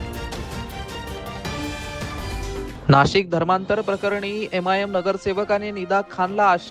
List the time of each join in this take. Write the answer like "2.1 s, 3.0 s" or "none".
2.7 s